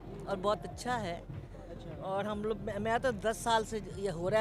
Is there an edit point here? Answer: no; 0 cuts

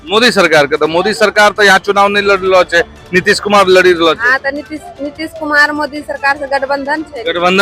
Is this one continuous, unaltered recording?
yes; 0 cuts

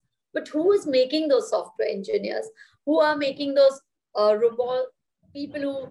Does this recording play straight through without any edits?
yes; 0 cuts

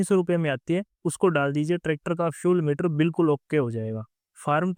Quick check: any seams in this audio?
no; 0 cuts

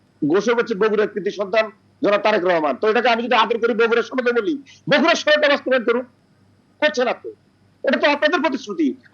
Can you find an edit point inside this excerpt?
no; 0 cuts

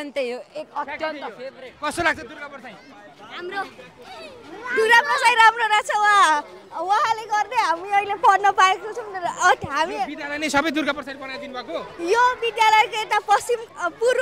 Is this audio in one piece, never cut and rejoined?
yes; 0 cuts

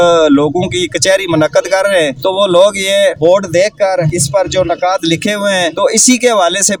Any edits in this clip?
no; 0 cuts

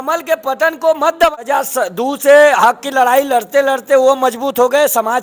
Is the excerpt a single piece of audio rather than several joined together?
no; 1 cut; at 1.4 s

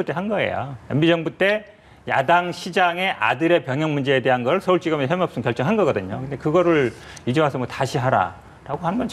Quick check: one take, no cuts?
yes; 0 cuts

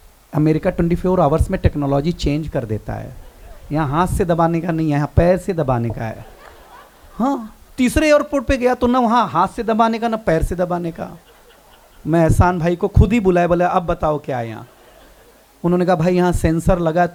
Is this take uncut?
yes; 0 cuts

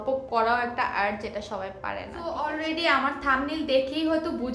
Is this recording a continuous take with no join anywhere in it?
no; 1 cut; at 2.1 s

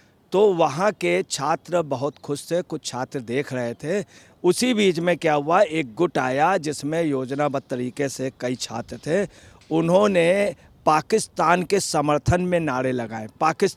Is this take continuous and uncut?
yes; 0 cuts

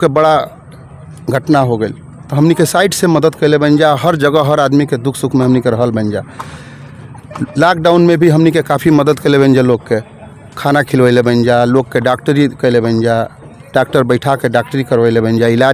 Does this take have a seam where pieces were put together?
no; 0 cuts

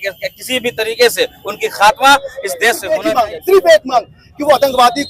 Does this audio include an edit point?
yes; 1 cut; at 2.9 s

